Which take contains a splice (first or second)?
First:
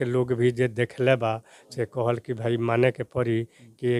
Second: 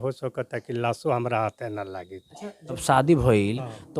second